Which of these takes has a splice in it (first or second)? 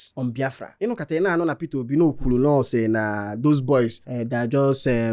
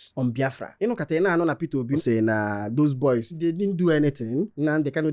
second